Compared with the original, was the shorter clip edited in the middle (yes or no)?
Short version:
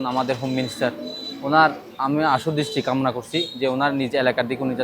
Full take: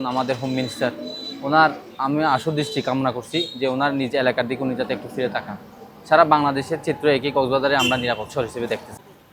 no